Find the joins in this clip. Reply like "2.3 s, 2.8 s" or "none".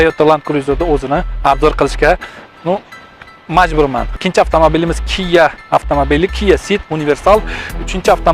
4.1 s